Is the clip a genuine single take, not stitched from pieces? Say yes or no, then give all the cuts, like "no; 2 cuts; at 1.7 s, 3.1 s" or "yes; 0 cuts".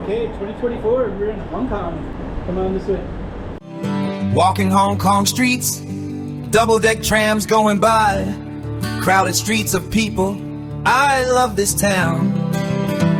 yes; 0 cuts